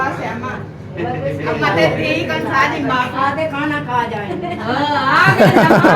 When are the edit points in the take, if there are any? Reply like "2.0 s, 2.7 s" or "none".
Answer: 3.1 s